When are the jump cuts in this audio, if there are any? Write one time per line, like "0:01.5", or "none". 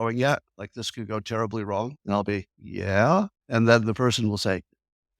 0:02.0
0:02.6
0:03.4